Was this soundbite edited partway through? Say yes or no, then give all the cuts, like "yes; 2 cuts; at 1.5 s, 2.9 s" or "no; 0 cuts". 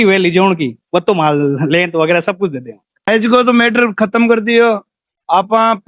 yes; 1 cut; at 2.9 s